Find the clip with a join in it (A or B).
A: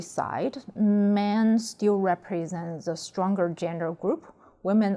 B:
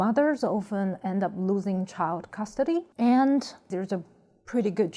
B